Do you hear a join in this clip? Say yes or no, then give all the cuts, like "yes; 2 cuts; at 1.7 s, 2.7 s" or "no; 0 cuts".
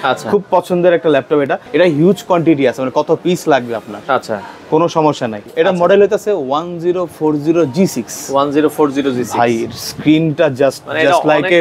yes; 2 cuts; at 1.6 s, 5.4 s